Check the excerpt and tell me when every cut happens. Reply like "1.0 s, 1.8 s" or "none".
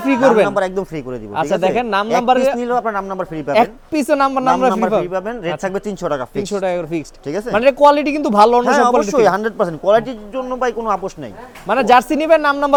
none

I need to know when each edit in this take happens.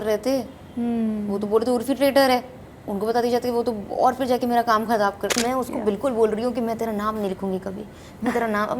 5.3 s

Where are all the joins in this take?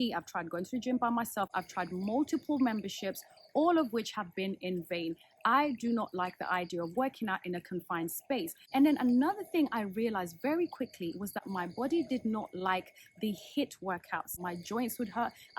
8.6 s, 14.4 s

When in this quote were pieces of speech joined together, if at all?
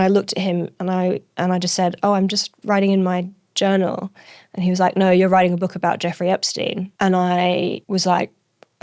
6.9 s, 7.8 s

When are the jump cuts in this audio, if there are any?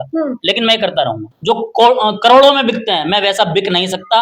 1.3 s

